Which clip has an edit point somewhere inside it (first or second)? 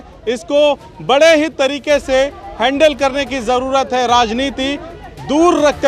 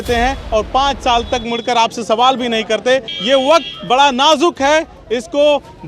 second